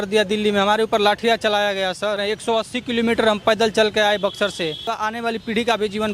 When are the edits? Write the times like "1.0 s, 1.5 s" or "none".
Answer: 2.2 s, 5.0 s